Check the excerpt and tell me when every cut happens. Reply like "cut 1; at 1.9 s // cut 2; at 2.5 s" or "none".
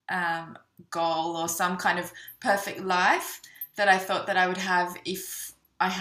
cut 1; at 1.8 s